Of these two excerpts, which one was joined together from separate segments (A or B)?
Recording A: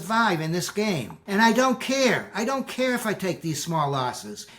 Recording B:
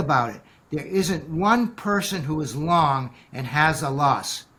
A